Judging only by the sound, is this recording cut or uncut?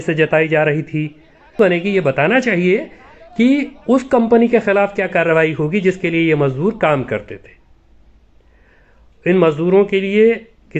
cut